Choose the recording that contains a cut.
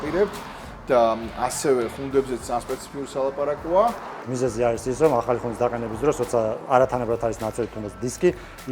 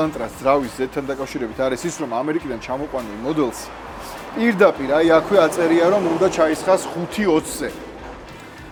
first; 1 cut; at 4.2 s

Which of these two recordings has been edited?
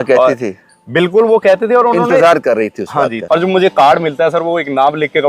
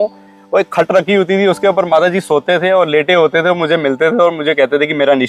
first; 1 cut; at 3.2 s

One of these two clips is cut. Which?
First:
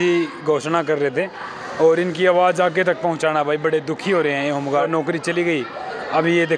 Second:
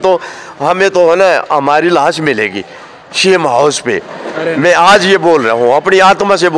first; 1 cut; at 4.9 s

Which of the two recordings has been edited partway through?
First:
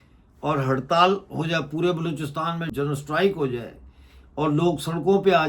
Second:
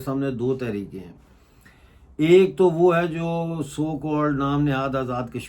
first; 1 cut; at 2.7 s

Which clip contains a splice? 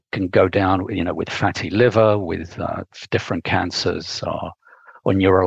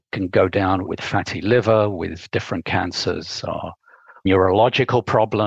second; 3 cuts; at 0.9 s, 2.2 s, 4.2 s

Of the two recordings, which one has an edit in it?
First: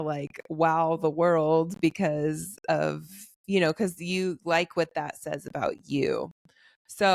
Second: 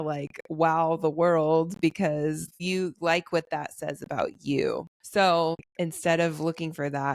second; 3 cuts; at 2.6 s, 4.9 s, 5.7 s

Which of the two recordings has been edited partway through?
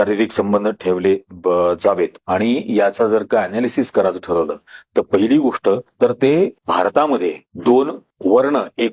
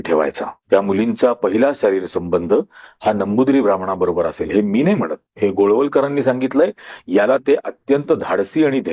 first; 1 cut; at 2.2 s

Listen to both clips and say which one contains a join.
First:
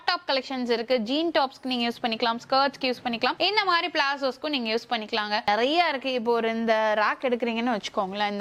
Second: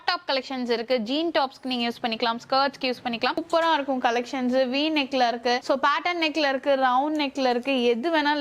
second; 1 cut; at 3.4 s

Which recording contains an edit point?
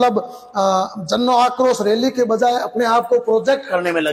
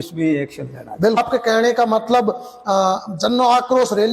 second; 1 cut; at 1.2 s

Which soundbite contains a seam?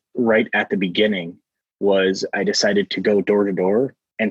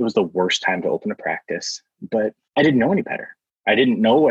second; 1 cut; at 2.4 s

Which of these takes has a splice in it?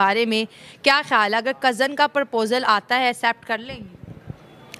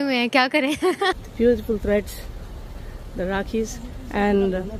second; 1 cut; at 1.2 s

